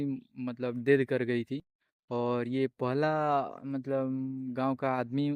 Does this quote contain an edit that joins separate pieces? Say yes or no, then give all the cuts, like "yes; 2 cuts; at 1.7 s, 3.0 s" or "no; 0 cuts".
no; 0 cuts